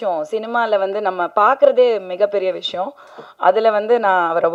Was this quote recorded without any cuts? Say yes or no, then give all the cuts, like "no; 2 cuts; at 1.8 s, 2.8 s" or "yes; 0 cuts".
yes; 0 cuts